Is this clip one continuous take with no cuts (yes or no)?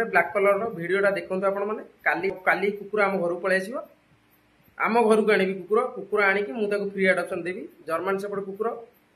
no